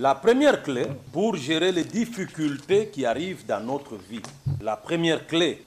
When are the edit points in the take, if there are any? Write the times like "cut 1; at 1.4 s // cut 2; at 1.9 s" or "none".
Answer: cut 1; at 1.0 s // cut 2; at 4.6 s